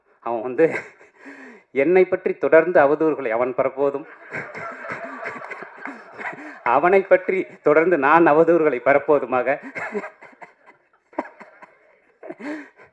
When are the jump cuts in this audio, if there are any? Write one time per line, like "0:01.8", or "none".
0:11.1